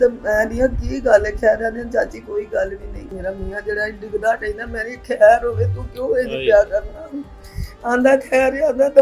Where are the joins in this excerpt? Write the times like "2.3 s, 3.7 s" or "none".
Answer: 3.1 s